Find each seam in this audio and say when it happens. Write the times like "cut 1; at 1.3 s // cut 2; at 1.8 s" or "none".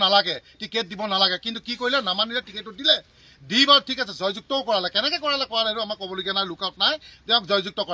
none